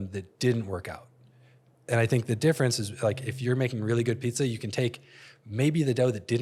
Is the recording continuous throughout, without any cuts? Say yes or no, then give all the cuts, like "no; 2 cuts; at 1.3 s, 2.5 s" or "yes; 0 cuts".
yes; 0 cuts